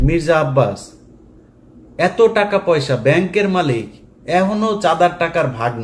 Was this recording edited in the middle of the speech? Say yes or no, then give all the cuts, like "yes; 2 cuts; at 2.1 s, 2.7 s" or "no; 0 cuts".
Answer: no; 0 cuts